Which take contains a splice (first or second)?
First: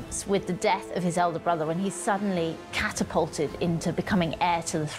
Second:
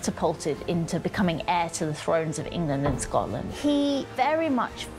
second